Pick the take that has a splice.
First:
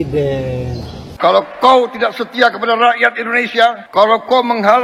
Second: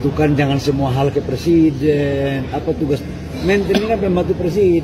first; 1 cut; at 1.1 s

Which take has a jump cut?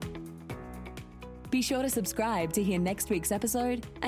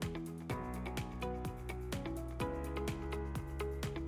first; 1 cut; at 1.4 s

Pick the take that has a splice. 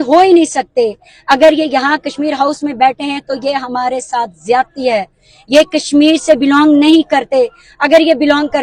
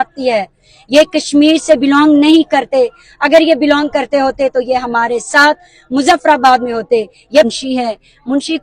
second; 1 cut; at 7.5 s

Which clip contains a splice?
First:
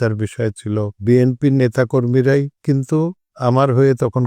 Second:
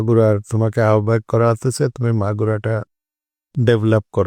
first; 2 cuts; at 1.0 s, 3.2 s

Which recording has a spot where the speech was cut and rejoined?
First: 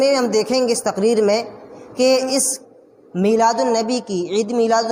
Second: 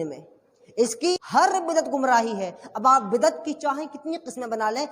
second; 1 cut; at 1.1 s

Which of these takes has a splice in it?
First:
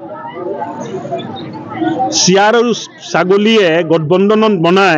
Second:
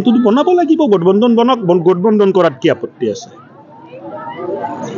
first; 1 cut; at 2.0 s

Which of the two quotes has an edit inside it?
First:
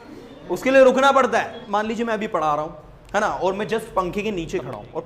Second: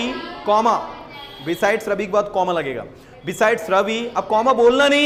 first; 1 cut; at 1.6 s

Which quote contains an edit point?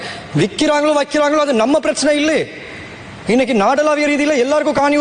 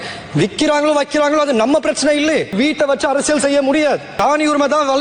second; 2 cuts; at 2.5 s, 4.1 s

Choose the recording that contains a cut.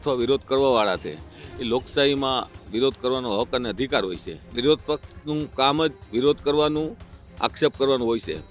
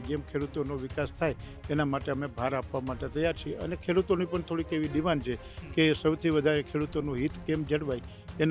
first; 1 cut; at 4.5 s

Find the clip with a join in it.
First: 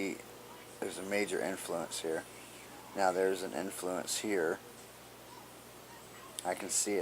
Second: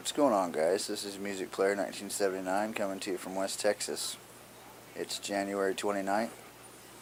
first; 1 cut; at 6.0 s

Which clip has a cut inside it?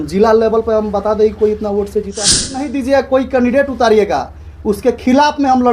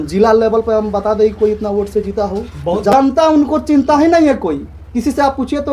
first; 1 cut; at 2.6 s

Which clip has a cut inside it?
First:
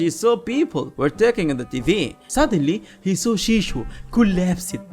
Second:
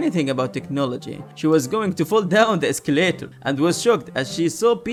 first; 1 cut; at 2.2 s

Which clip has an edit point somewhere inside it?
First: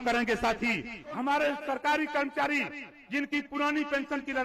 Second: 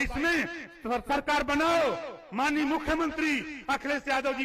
first; 1 cut; at 1.0 s

